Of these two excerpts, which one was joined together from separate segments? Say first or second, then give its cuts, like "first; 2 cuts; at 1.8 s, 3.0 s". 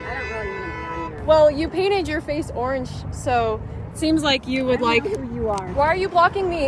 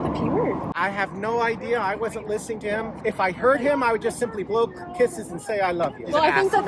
first; 2 cuts; at 1.2 s, 5.7 s